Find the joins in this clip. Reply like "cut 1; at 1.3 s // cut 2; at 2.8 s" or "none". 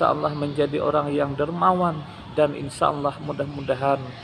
none